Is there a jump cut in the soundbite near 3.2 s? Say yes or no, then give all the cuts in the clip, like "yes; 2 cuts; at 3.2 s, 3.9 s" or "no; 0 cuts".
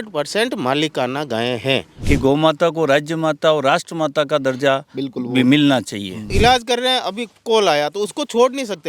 no; 2 cuts; at 1.9 s, 6.3 s